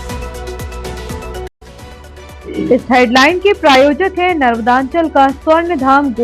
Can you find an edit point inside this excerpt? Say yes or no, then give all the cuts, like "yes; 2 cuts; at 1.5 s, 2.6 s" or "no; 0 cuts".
yes; 1 cut; at 1.5 s